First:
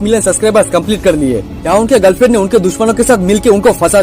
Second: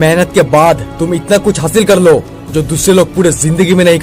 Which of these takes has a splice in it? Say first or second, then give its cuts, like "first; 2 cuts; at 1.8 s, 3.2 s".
first; 1 cut; at 1.6 s